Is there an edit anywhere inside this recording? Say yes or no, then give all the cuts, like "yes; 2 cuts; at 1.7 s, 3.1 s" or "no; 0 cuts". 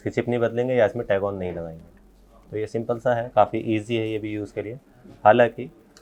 no; 0 cuts